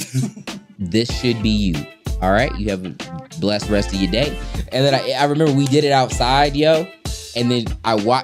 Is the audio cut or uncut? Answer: uncut